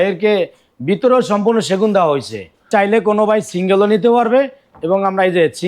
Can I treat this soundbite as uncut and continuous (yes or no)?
no